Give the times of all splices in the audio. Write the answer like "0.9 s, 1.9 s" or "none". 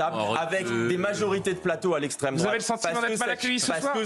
none